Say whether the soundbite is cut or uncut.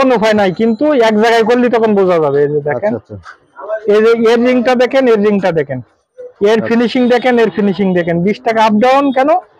uncut